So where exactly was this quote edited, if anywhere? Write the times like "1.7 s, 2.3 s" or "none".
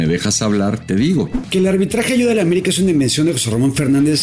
1.4 s